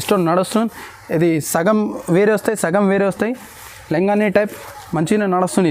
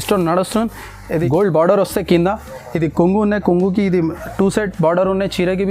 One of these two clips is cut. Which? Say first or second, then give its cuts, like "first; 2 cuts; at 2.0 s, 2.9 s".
second; 1 cut; at 1.2 s